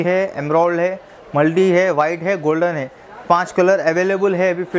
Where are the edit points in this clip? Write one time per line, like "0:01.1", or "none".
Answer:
none